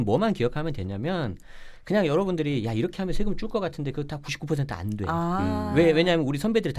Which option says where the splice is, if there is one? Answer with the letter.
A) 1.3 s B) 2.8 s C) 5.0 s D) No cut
D